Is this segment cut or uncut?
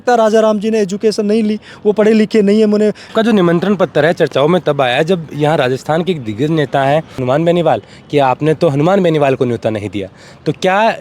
cut